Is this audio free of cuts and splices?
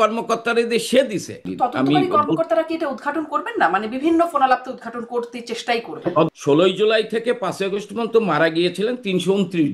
no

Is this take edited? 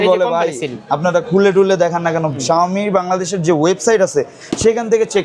yes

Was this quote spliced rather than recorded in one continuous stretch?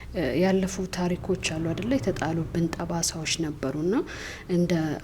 no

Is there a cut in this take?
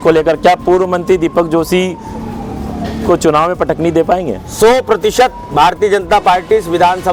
no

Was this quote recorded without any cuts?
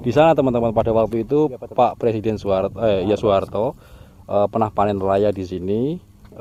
yes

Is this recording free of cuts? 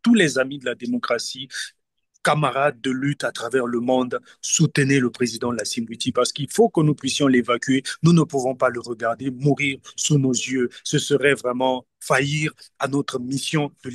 yes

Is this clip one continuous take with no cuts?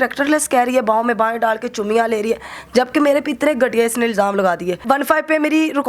no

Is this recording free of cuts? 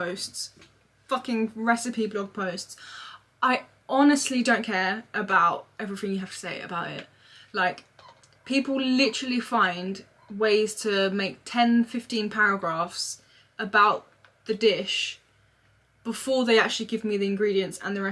yes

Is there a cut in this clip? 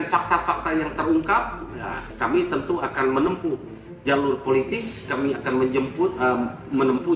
no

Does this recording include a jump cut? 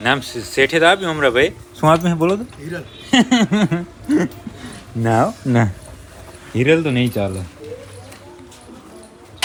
no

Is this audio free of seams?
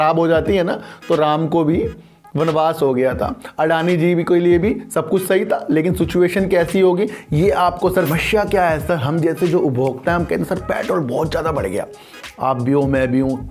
no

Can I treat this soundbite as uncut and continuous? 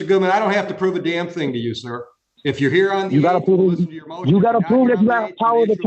yes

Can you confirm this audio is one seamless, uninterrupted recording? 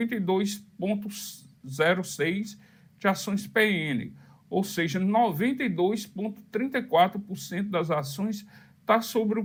yes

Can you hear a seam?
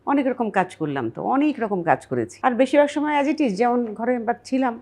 yes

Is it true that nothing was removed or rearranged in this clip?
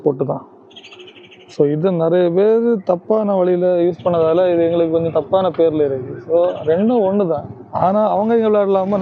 yes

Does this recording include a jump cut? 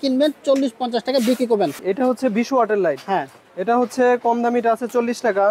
yes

